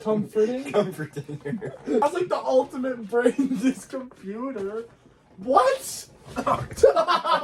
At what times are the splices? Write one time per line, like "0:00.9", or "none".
0:02.0